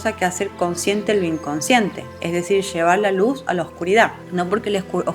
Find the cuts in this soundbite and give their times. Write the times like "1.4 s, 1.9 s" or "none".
4.2 s